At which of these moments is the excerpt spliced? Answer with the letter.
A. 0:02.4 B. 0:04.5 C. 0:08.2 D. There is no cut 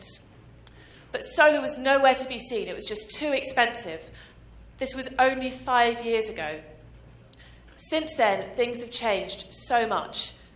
A